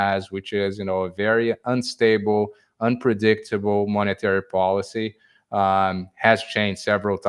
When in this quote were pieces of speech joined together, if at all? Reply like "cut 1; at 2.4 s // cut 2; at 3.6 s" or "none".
none